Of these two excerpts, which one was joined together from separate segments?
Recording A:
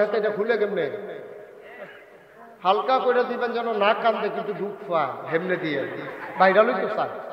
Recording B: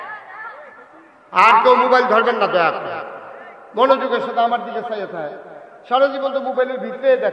A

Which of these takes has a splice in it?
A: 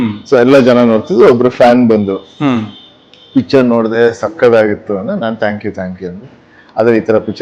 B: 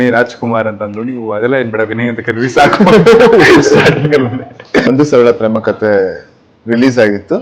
B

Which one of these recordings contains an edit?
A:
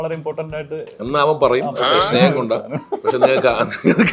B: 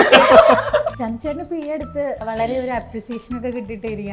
B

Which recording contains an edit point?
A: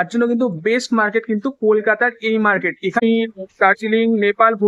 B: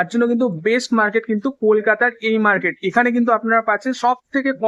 A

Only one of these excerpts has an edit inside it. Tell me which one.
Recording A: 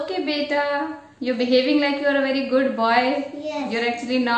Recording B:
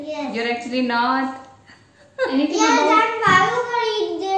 B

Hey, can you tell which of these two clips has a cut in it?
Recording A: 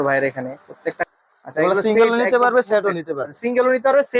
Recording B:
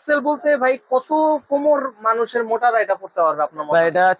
A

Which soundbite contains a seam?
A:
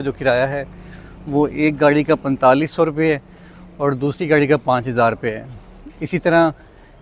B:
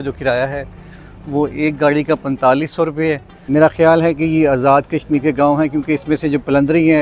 B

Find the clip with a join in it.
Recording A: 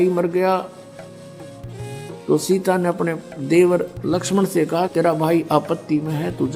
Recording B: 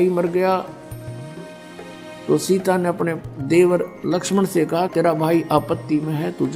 B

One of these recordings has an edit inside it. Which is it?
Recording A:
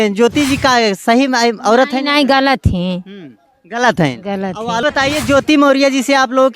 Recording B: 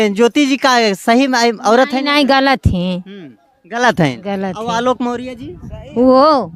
A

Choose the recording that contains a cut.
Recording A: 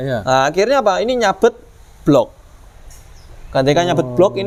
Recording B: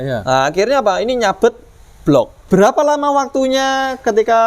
B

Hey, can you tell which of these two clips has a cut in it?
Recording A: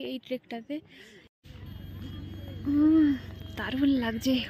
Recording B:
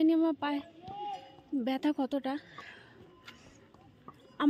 A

